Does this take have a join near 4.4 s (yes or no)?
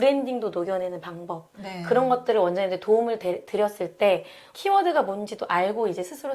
yes